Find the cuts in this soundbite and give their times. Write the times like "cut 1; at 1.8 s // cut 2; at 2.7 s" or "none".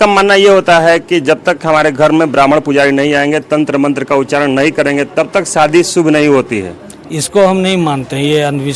none